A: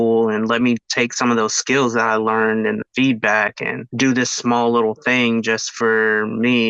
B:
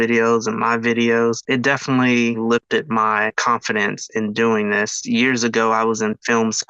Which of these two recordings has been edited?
B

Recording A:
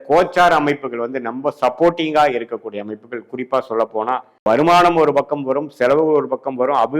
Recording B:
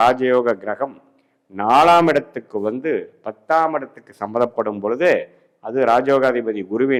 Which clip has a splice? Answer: A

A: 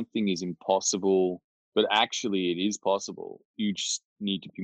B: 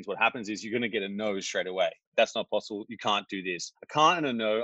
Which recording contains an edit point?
B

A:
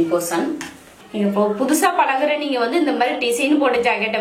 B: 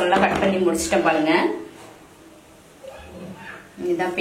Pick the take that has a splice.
A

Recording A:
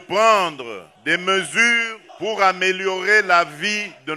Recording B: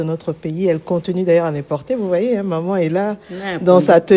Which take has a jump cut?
A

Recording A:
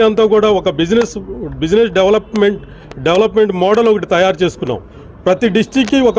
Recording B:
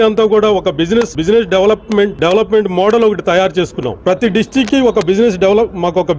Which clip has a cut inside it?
B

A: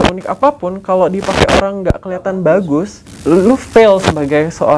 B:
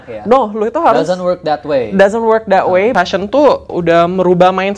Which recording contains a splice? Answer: B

